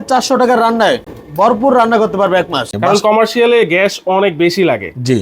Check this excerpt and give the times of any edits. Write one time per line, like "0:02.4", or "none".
0:01.2
0:02.7